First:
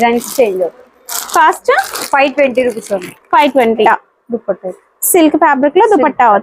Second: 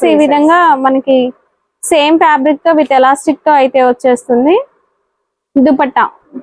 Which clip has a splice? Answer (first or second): first